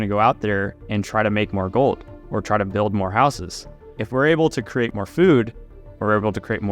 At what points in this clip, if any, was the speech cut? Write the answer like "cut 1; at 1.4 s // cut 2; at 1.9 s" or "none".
cut 1; at 4.0 s // cut 2; at 4.9 s